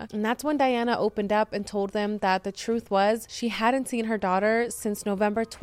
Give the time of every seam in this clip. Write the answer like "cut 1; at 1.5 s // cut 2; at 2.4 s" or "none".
cut 1; at 3.3 s